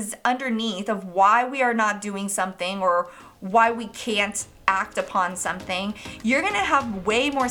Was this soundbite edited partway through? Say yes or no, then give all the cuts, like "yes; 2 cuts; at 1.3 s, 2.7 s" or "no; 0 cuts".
no; 0 cuts